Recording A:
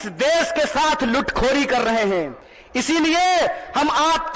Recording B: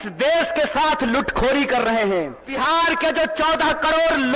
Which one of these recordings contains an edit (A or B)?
B